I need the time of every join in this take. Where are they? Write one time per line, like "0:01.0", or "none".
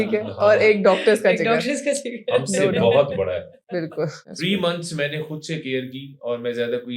0:04.3